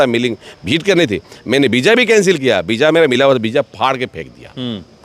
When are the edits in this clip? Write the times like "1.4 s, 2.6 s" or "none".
none